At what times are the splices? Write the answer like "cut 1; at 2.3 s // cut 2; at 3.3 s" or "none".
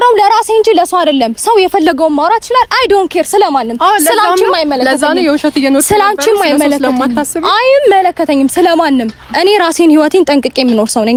none